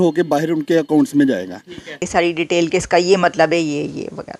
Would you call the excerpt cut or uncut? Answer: cut